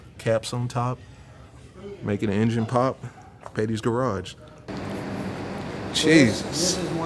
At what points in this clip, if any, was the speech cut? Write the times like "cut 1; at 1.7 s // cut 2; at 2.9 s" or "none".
cut 1; at 4.6 s